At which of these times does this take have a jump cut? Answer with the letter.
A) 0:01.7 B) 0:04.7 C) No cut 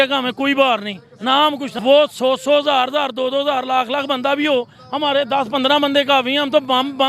A